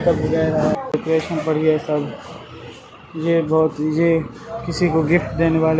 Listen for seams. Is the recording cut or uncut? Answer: cut